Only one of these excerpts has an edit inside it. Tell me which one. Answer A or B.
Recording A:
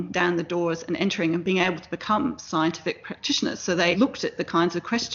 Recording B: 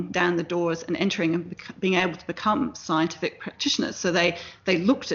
A